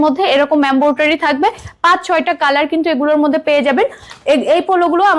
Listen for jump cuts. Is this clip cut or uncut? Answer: uncut